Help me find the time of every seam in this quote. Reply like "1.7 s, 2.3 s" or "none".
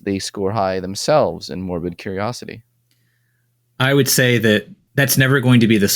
4.8 s